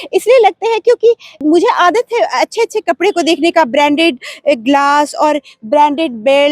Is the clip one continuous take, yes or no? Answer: no